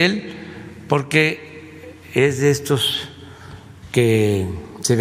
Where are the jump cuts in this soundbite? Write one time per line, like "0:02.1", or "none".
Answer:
none